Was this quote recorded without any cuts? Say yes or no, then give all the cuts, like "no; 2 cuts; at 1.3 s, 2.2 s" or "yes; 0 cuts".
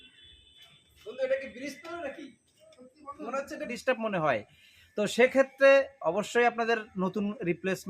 no; 1 cut; at 3.7 s